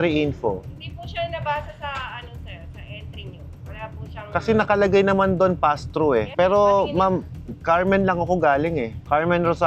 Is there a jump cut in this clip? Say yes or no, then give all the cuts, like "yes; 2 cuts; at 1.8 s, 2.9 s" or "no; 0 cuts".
yes; 1 cut; at 6.3 s